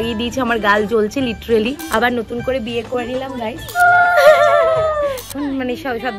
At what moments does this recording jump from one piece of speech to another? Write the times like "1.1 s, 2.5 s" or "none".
1.8 s, 3.8 s, 5.3 s